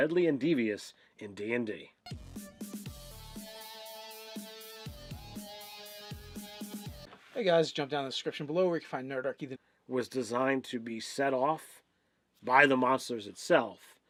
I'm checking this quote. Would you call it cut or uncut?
uncut